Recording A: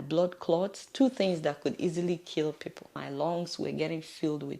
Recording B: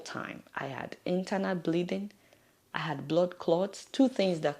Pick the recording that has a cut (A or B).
A